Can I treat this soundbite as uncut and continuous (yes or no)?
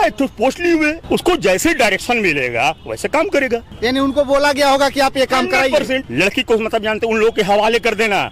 no